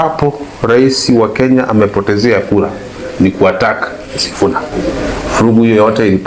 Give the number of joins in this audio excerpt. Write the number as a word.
one